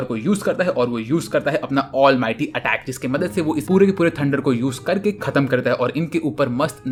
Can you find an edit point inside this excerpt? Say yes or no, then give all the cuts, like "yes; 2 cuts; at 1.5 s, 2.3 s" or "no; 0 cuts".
no; 0 cuts